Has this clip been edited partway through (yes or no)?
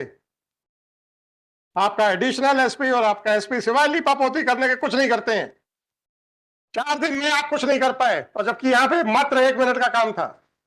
no